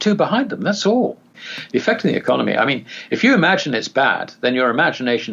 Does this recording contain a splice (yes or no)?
yes